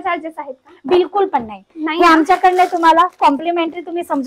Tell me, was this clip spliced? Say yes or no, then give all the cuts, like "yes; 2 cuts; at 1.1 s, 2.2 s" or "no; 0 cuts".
no; 0 cuts